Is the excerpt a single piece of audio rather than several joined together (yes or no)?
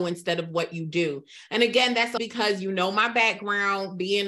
no